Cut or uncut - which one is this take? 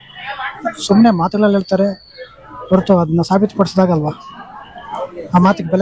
uncut